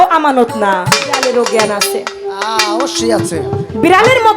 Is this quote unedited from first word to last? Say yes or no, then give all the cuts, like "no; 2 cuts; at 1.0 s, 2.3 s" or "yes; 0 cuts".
no; 1 cut; at 1.2 s